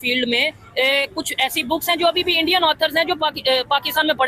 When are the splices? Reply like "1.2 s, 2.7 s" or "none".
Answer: none